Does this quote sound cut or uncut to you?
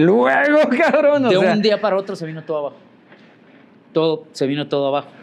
uncut